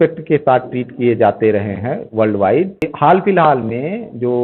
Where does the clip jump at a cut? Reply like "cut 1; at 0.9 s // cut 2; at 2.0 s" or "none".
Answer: cut 1; at 2.9 s